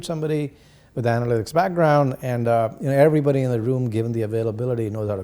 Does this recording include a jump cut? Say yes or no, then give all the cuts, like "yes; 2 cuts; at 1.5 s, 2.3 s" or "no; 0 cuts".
no; 0 cuts